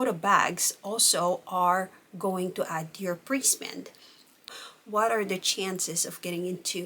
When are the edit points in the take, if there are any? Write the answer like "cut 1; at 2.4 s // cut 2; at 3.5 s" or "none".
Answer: cut 1; at 4.4 s